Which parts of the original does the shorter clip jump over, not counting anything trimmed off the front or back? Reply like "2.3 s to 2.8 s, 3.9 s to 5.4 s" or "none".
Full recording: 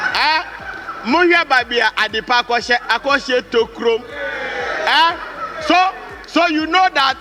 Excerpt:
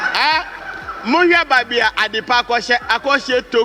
none